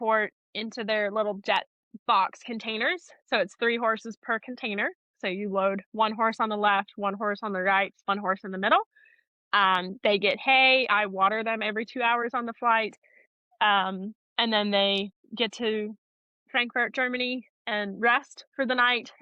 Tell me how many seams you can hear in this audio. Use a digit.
0